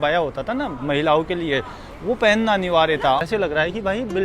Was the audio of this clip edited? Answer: yes; 1 cut; at 3.2 s

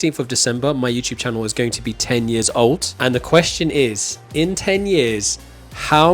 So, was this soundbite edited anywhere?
yes; 1 cut; at 2.9 s

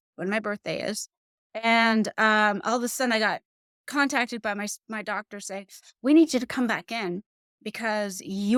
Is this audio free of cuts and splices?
yes; 0 cuts

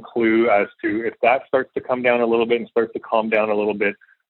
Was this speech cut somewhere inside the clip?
no; 0 cuts

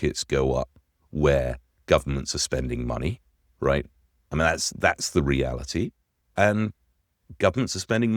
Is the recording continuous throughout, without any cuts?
yes; 0 cuts

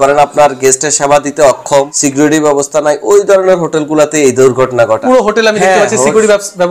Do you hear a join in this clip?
yes; 2 cuts; at 2.0 s, 5.0 s

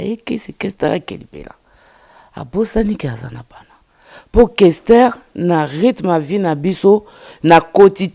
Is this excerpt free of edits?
yes; 0 cuts

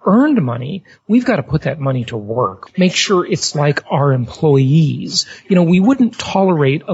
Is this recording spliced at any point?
yes; 1 cut; at 2.6 s

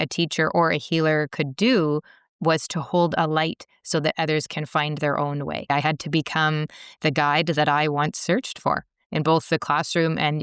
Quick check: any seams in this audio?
yes; 1 cut; at 5.7 s

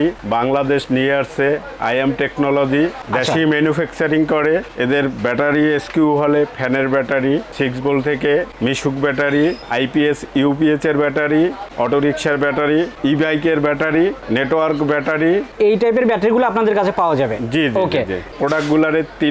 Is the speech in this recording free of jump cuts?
yes; 0 cuts

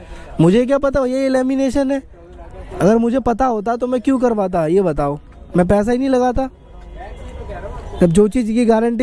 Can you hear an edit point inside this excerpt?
no; 0 cuts

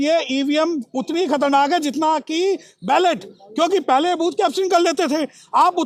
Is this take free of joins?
yes; 0 cuts

